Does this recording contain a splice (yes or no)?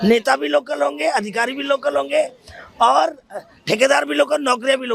no